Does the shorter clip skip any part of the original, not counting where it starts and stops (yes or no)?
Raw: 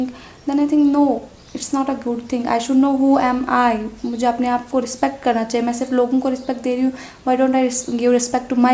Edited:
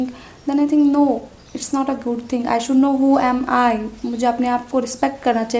no